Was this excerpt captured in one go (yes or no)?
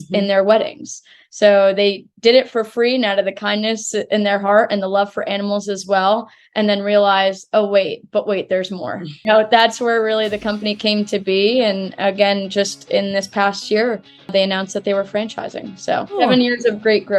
no